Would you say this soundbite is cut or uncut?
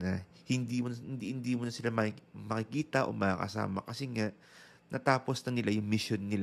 uncut